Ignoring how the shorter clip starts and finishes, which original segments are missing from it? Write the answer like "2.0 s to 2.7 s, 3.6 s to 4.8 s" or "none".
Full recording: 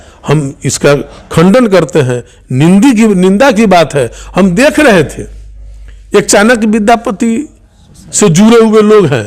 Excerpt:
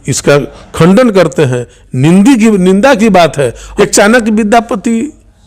4.2 s to 6.0 s